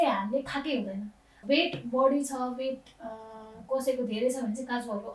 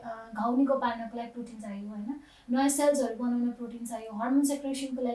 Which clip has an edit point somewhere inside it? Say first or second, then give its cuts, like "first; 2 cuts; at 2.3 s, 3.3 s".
first; 1 cut; at 1.4 s